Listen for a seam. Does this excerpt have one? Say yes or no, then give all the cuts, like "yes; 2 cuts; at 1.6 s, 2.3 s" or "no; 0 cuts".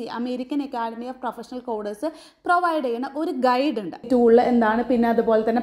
yes; 1 cut; at 4.1 s